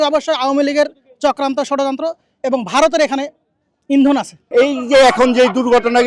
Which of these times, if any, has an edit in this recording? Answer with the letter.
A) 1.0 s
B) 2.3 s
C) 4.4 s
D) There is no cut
C